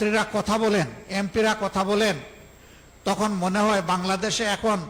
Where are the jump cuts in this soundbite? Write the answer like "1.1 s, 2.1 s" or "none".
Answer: none